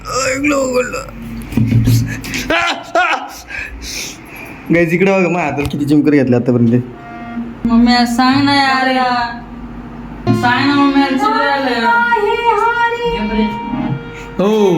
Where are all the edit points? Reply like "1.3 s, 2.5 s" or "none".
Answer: 4.6 s, 7.7 s, 10.3 s